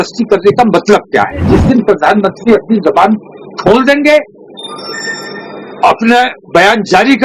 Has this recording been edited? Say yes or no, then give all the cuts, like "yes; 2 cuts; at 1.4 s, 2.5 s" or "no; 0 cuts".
yes; 1 cut; at 1.5 s